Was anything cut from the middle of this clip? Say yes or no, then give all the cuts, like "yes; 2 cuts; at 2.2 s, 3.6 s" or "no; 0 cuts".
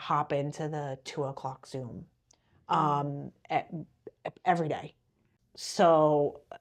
no; 0 cuts